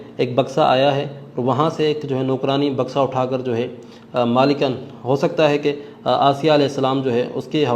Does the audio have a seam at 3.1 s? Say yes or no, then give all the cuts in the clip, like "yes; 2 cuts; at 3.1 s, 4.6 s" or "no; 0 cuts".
no; 0 cuts